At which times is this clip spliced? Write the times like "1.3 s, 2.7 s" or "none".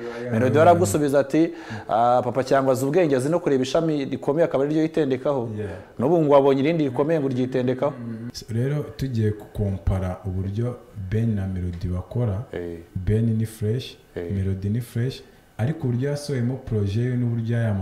8.4 s